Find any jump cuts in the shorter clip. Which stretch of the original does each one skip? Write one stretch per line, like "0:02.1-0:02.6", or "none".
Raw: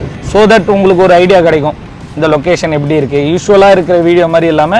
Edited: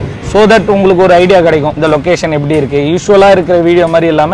0:01.7-0:02.1

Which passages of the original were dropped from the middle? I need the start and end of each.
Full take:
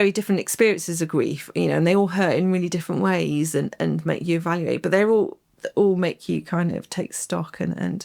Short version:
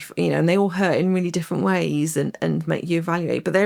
none

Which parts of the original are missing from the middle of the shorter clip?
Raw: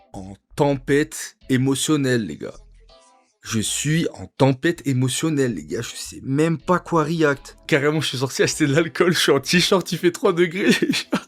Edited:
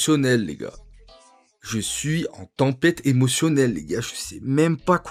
none

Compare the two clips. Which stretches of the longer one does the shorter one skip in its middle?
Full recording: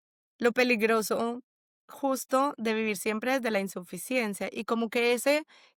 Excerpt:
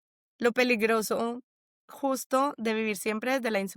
none

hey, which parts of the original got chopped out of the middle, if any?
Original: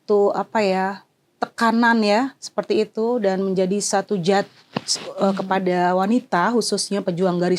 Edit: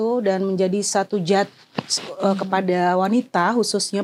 none

